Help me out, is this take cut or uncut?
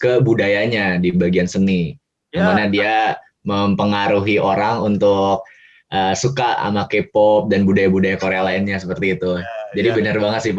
uncut